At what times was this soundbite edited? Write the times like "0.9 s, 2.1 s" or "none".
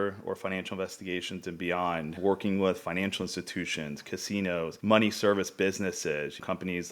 2.2 s, 4.8 s